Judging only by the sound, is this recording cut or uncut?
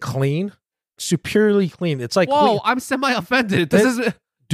uncut